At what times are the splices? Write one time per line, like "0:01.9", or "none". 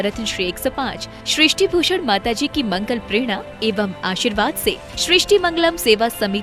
none